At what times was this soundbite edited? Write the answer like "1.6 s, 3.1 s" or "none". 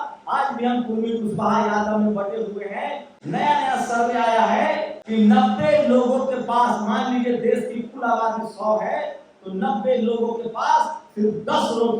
3.1 s, 4.9 s